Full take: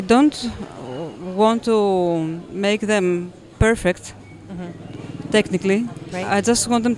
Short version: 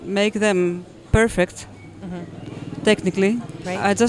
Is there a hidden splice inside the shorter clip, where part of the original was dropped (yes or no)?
no